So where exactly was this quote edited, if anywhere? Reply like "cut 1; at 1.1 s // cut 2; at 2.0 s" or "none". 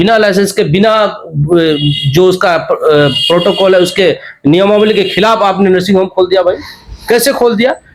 none